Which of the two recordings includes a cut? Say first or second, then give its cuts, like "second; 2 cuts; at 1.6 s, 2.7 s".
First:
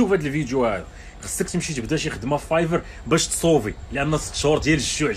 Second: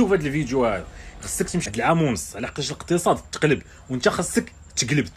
second; 1 cut; at 1.7 s